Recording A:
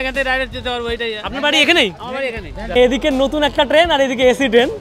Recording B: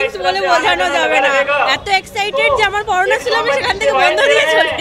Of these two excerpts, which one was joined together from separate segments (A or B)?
A